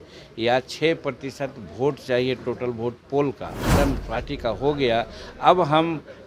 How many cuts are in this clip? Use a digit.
1